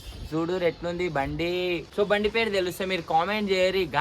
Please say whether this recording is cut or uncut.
cut